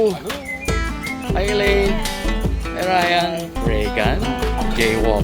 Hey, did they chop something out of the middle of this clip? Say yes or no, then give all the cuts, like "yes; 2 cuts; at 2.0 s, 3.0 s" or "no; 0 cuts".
yes; 2 cuts; at 1.1 s, 3.5 s